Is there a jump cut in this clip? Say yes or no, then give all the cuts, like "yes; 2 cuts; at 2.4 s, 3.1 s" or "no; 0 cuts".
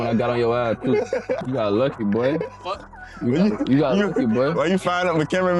yes; 1 cut; at 1.4 s